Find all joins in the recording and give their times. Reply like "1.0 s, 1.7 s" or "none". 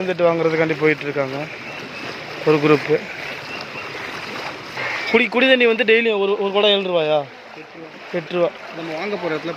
4.8 s